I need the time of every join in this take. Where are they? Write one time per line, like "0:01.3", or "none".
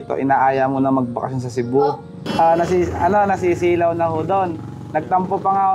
0:02.1

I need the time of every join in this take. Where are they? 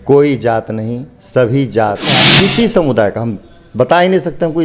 0:02.2

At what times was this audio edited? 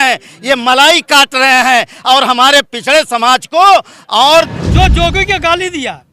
0:04.5

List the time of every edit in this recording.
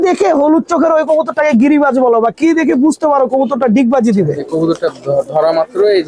0:04.4

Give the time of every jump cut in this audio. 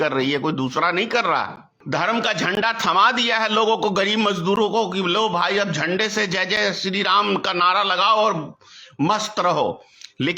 0:01.7

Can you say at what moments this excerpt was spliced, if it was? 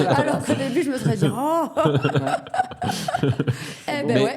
none

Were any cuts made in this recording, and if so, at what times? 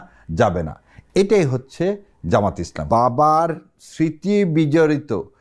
0:02.8

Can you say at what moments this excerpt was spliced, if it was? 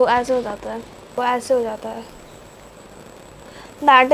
0:01.1

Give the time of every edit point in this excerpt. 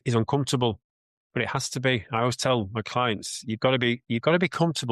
none

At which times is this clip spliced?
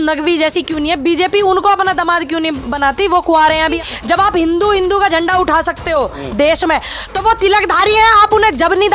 0:03.8

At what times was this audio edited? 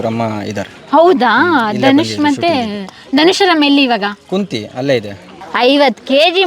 0:05.3

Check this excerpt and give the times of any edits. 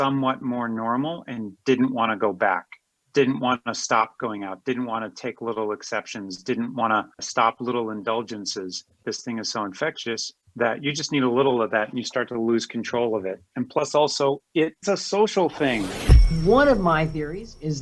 0:16.3

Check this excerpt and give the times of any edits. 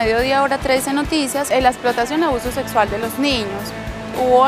0:01.4

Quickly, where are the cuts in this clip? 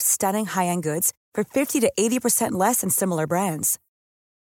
none

